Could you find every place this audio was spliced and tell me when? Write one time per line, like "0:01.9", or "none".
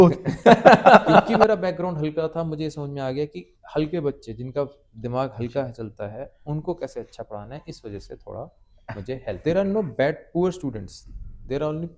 0:01.3
0:09.4